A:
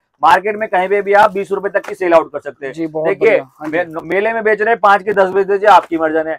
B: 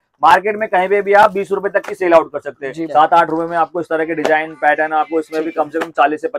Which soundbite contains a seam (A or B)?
B